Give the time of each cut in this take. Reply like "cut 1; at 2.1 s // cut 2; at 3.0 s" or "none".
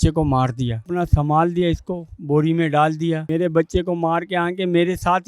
cut 1; at 0.8 s // cut 2; at 3.3 s